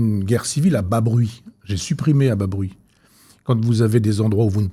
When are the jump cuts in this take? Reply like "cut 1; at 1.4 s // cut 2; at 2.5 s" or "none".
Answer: none